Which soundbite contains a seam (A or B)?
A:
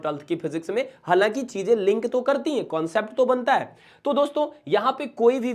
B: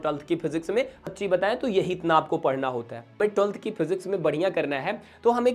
B